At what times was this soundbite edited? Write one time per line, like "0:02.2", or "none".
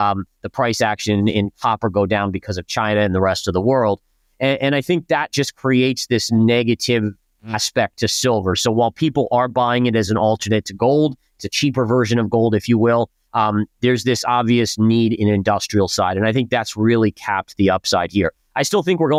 none